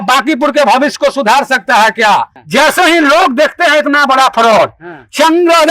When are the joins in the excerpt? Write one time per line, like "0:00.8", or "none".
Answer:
0:02.4